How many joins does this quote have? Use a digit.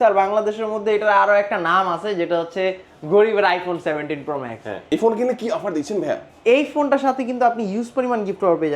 1